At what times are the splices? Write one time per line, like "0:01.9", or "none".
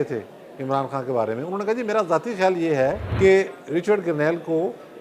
0:03.1